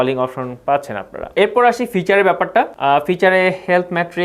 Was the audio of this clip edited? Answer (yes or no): no